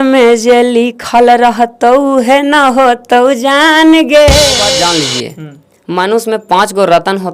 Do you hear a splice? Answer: yes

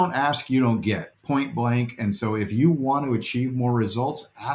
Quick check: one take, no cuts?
no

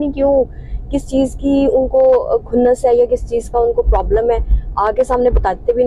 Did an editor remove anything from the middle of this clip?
no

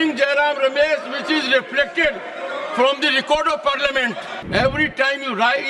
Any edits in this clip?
yes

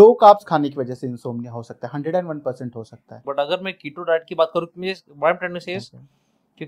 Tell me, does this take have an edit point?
yes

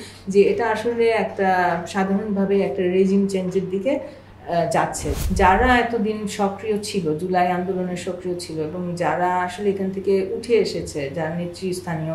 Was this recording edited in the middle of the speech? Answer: yes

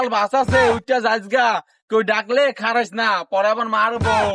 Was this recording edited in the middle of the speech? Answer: no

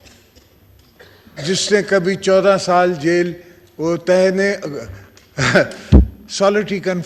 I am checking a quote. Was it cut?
no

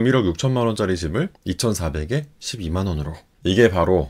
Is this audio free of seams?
yes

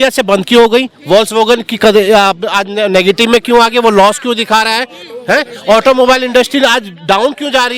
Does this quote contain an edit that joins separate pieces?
no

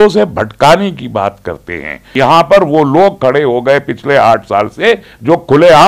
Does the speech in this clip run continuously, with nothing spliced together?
no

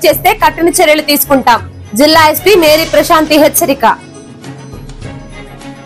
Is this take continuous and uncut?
yes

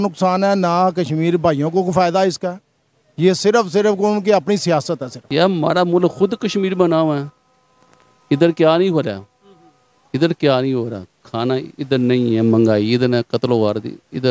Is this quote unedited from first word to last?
no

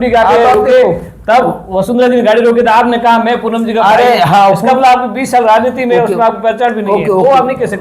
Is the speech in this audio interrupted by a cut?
no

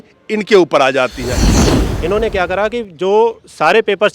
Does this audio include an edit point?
yes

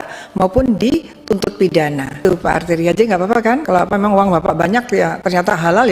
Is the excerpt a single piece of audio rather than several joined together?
no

